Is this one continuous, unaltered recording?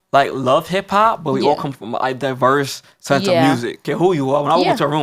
no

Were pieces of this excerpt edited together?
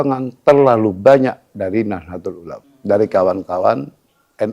yes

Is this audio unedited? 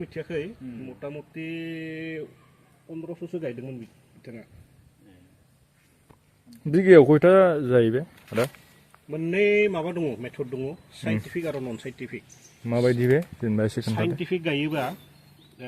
yes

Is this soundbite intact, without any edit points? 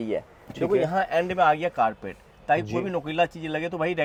yes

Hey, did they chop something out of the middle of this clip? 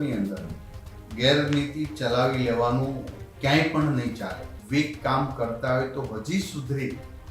yes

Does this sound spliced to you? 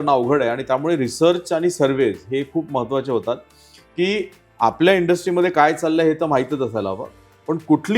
no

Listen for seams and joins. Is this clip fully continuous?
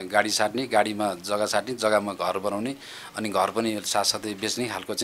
yes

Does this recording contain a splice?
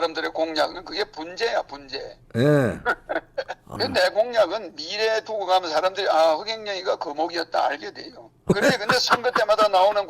yes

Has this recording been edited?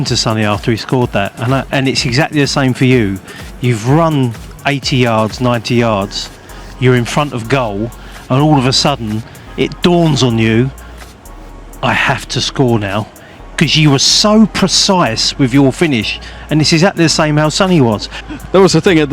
yes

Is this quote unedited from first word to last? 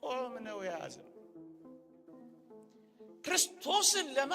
no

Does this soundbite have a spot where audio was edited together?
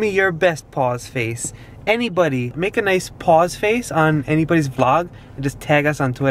yes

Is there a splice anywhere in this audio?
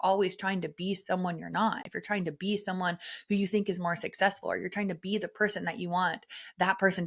no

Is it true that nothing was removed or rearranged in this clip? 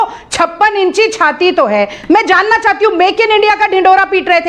no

